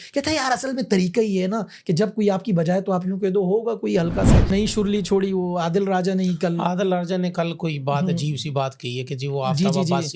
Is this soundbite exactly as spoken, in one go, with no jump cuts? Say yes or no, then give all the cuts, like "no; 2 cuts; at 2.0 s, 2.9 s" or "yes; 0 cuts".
no; 1 cut; at 4.5 s